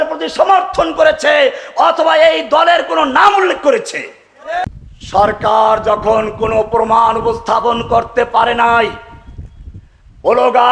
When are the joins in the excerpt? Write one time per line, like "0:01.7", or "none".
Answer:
0:04.6